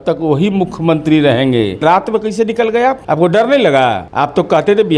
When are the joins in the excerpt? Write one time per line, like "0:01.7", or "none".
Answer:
0:01.8
0:03.0
0:04.1